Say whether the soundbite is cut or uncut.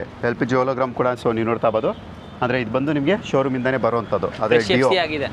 uncut